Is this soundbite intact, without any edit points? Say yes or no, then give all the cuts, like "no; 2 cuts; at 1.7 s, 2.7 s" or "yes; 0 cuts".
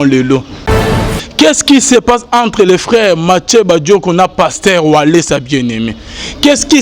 no; 1 cut; at 1.0 s